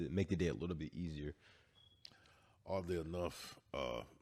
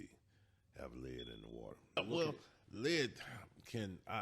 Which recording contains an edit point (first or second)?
second